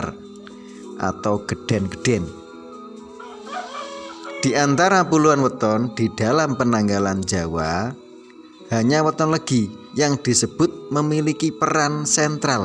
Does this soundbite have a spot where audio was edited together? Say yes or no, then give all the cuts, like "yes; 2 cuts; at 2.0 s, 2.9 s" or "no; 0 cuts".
yes; 2 cuts; at 2.3 s, 3.7 s